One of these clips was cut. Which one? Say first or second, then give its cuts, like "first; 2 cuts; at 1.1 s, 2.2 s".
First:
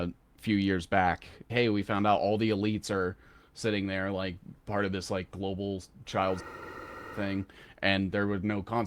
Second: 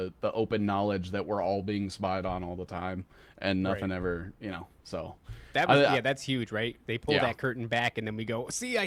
first; 1 cut; at 1.5 s